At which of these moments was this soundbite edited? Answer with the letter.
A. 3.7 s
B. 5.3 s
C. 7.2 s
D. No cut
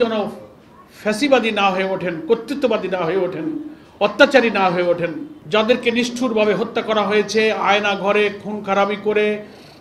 B